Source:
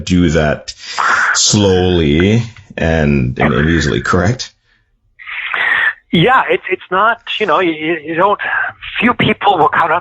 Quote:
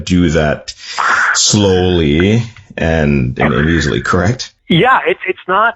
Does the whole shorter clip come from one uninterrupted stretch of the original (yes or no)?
no